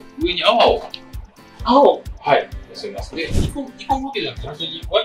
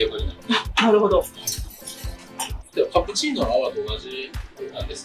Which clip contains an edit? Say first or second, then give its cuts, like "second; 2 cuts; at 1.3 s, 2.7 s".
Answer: first; 1 cut; at 3.3 s